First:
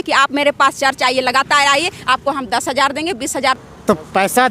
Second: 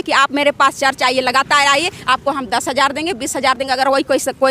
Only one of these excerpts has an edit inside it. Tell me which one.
first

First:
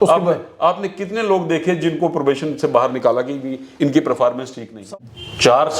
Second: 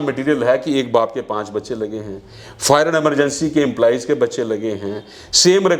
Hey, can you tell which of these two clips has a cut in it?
first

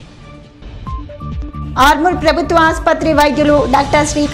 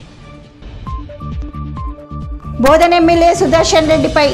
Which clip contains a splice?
second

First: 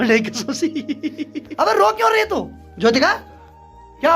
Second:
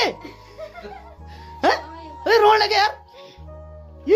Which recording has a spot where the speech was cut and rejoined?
first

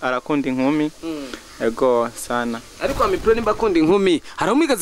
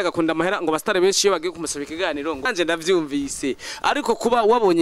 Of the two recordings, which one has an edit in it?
second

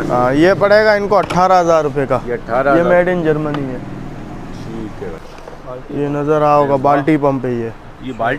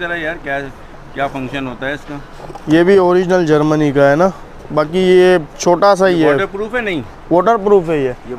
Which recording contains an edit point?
first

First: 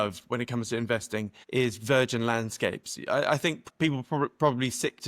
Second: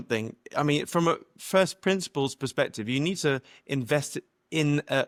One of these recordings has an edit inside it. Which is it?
first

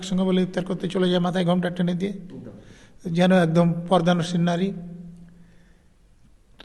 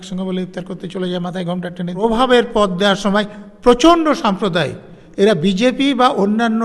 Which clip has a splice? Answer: second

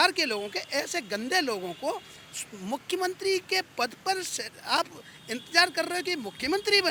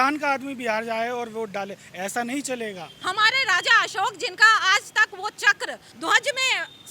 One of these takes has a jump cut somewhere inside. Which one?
second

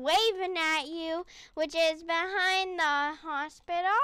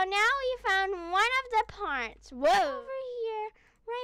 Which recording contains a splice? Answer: second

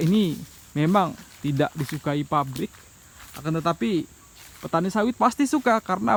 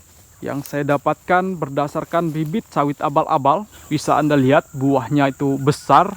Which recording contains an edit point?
second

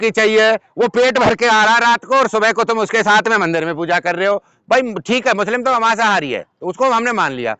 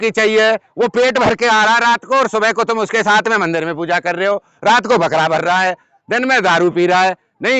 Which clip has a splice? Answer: first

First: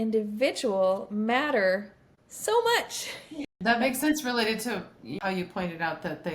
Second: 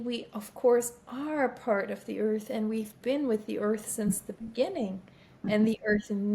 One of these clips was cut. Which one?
first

